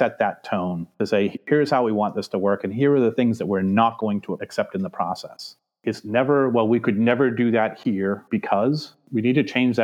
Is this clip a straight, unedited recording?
no; 2 cuts; at 1.4 s, 5.7 s

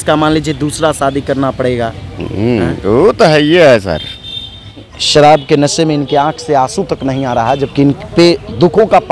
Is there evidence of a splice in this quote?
yes; 1 cut; at 5.0 s

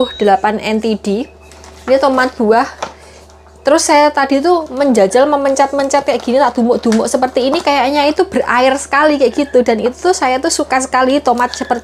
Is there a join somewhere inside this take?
no; 0 cuts

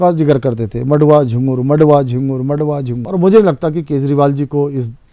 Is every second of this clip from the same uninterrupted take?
no; 1 cut; at 3.0 s

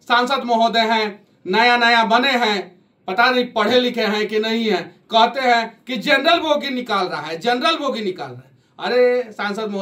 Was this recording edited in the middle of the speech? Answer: no; 0 cuts

